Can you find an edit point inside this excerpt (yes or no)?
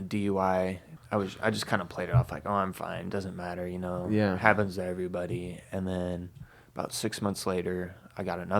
yes